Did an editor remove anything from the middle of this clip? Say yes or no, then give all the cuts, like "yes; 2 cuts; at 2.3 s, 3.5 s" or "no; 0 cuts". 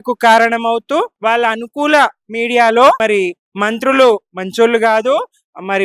yes; 2 cuts; at 1.1 s, 3.0 s